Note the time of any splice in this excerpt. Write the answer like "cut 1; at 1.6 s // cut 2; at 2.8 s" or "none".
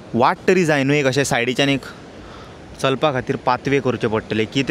none